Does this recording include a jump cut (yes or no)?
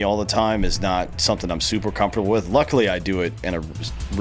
no